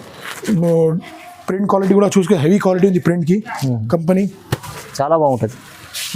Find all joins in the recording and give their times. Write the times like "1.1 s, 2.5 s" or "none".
4.8 s